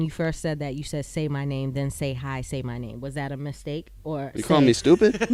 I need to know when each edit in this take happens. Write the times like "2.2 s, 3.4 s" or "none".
none